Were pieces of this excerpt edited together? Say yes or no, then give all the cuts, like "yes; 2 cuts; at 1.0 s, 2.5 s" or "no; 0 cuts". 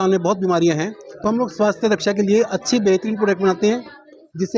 no; 0 cuts